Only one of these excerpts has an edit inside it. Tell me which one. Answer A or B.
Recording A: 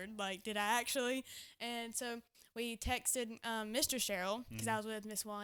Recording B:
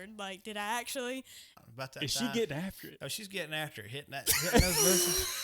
B